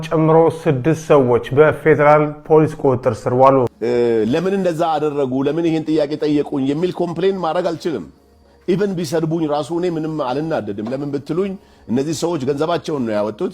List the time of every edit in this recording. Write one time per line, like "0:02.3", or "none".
0:03.8